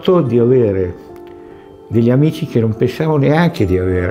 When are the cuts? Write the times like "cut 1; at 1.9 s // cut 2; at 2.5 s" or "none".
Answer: none

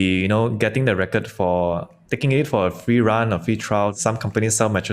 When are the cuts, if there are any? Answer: cut 1; at 3.9 s

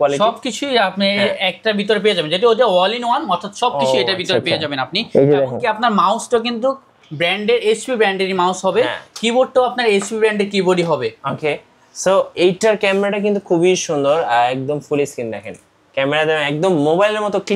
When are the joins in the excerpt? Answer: none

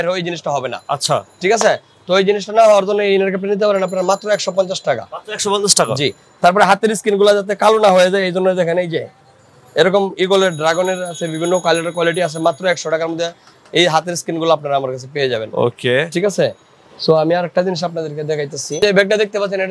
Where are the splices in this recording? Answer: none

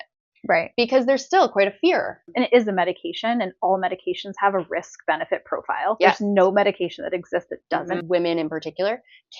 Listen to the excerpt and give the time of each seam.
cut 1; at 2.3 s // cut 2; at 8.0 s

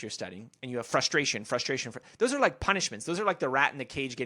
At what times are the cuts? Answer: none

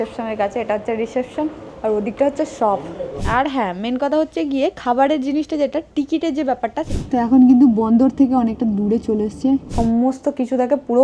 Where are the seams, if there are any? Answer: cut 1; at 3.2 s // cut 2; at 6.9 s // cut 3; at 9.7 s

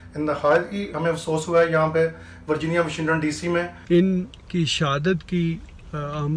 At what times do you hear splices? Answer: cut 1; at 3.8 s

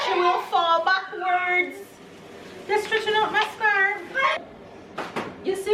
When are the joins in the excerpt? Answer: cut 1; at 4.4 s

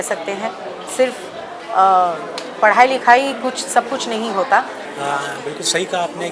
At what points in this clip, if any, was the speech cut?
cut 1; at 4.8 s

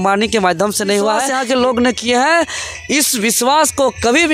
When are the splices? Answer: cut 1; at 1.3 s

